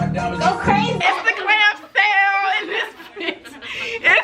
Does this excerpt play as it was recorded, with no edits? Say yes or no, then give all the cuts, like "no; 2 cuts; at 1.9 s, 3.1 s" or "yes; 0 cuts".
no; 1 cut; at 1.0 s